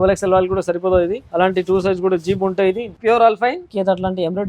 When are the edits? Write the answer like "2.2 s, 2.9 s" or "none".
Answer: 1.2 s, 2.9 s, 3.7 s